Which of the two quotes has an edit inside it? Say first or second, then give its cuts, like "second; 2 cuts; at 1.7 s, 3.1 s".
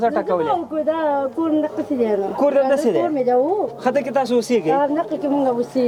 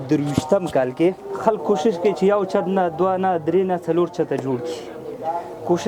second; 1 cut; at 1.3 s